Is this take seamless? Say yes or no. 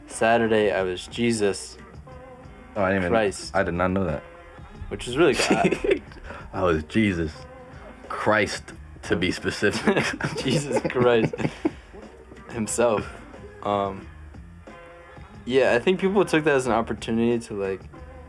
yes